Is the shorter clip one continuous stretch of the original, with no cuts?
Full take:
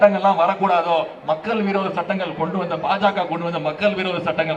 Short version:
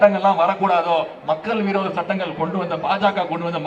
yes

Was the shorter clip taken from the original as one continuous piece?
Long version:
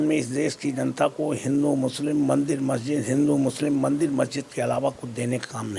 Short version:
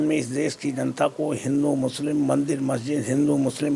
yes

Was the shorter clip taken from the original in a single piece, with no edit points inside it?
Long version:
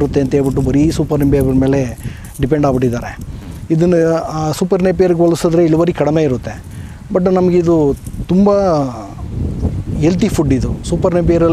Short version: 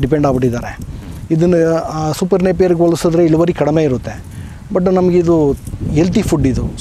no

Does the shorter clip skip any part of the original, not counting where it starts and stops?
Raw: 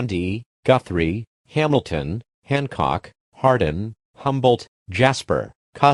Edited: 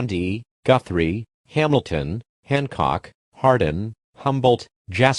no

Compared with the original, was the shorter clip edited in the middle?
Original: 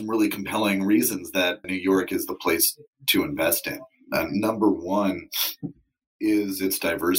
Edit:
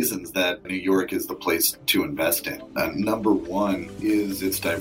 yes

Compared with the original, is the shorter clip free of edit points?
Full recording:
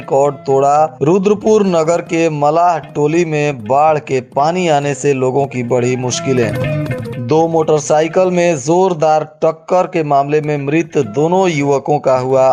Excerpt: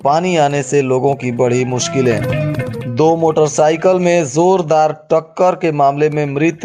yes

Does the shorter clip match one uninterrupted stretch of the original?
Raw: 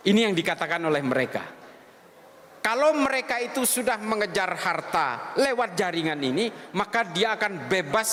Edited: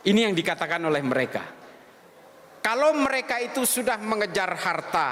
yes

